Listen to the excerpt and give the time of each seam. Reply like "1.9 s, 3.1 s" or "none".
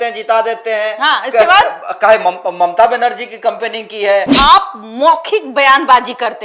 4.3 s